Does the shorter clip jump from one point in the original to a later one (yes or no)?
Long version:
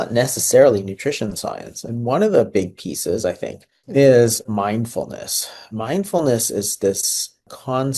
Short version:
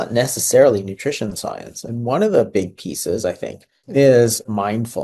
no